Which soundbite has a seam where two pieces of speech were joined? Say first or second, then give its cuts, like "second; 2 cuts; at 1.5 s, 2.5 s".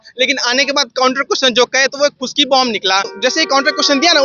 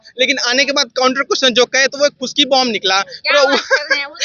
first; 1 cut; at 3.1 s